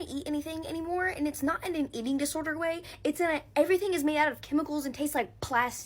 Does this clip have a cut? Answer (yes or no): no